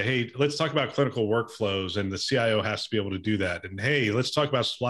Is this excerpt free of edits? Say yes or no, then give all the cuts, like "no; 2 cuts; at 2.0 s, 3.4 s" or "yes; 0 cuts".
yes; 0 cuts